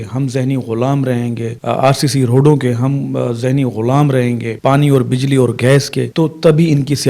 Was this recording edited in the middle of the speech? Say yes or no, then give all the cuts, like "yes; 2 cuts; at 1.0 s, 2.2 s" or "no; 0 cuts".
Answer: yes; 3 cuts; at 1.5 s, 4.5 s, 6.0 s